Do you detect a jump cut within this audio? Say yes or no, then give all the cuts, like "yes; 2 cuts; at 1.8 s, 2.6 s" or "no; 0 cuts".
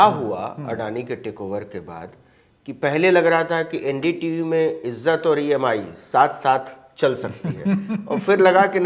no; 0 cuts